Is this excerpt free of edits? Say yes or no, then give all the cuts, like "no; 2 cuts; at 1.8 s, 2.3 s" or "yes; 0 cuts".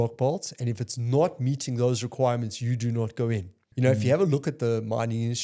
no; 1 cut; at 3.6 s